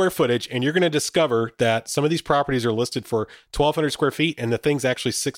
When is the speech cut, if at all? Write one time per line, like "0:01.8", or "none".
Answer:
none